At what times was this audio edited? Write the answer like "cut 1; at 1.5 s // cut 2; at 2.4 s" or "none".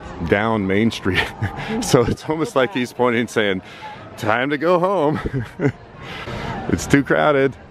cut 1; at 6.3 s